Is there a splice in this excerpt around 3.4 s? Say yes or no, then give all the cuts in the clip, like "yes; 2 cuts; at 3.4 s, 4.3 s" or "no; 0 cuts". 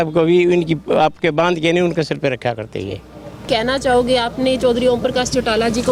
no; 0 cuts